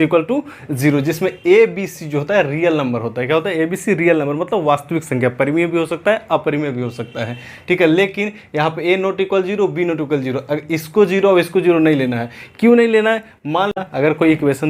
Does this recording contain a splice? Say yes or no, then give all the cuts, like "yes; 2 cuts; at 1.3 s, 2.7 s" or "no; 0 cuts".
yes; 1 cut; at 13.7 s